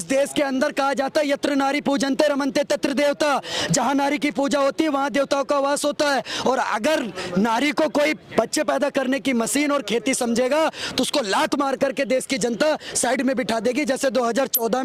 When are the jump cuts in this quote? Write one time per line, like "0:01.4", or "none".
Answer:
none